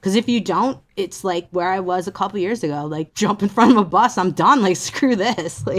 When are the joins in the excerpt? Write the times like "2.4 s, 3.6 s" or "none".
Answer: 0.8 s, 3.1 s